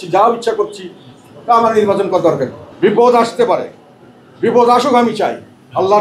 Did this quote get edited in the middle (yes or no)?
yes